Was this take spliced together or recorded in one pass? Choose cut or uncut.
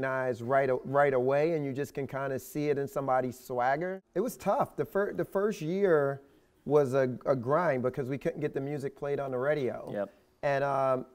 cut